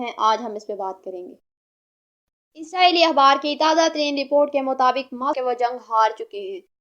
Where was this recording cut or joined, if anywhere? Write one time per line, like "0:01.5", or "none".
0:05.4